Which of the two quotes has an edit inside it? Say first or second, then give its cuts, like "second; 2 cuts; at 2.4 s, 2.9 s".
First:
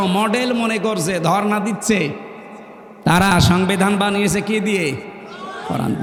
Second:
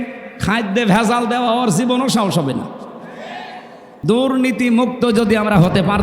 second; 1 cut; at 4.0 s